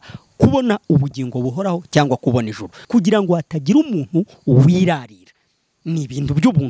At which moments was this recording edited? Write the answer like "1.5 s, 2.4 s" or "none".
2.8 s